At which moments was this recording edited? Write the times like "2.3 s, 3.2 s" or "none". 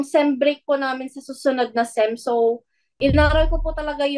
none

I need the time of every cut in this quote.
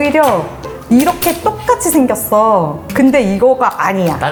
none

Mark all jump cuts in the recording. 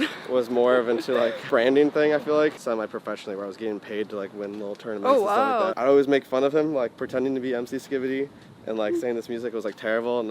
2.6 s, 5.7 s

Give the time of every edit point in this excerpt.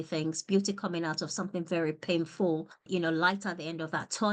2.8 s

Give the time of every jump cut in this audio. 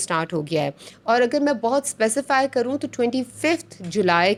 none

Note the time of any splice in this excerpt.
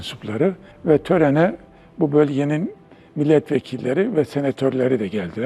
none

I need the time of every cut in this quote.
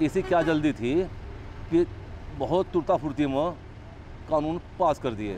none

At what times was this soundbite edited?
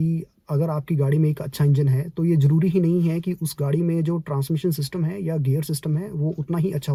none

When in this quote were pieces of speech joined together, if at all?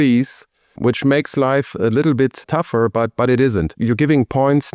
3.7 s

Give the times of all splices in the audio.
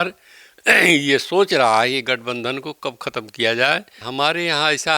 4.0 s

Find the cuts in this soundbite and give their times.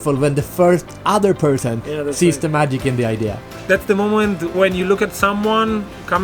3.5 s, 4.5 s

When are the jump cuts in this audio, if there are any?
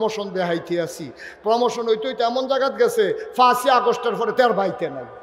none

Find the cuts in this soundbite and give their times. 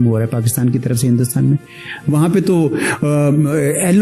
2.1 s

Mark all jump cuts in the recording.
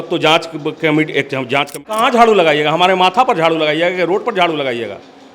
1.9 s

